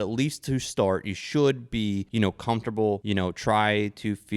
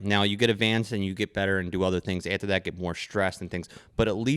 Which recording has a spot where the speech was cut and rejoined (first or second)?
first